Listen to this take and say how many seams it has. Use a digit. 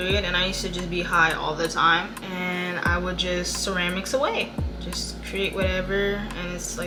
0